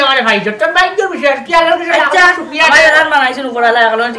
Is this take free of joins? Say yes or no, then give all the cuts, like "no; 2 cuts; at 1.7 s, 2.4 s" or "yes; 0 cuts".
yes; 0 cuts